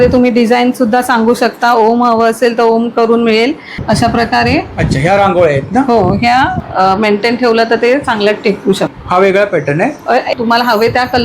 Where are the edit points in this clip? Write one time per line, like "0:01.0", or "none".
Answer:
0:03.8
0:06.6
0:10.3